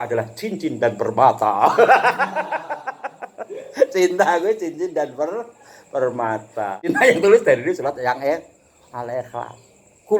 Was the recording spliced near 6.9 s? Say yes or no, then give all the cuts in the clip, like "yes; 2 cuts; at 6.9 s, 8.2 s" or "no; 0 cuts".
yes; 1 cut; at 6.9 s